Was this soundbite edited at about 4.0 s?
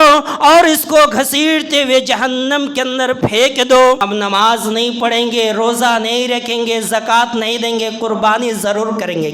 yes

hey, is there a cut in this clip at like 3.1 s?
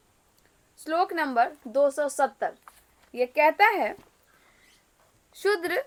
no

